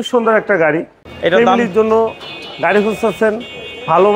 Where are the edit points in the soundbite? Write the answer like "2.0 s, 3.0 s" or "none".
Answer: 1.0 s